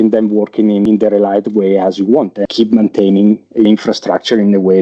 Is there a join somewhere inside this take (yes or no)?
yes